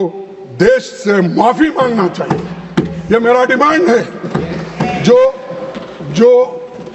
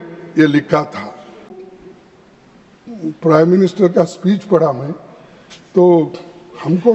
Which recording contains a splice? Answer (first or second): second